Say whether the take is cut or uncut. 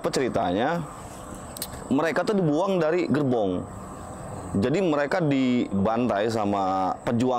cut